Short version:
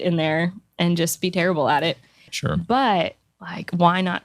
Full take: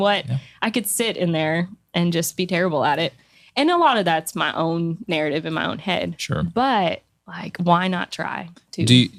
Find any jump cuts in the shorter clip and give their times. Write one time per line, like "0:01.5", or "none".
0:02.3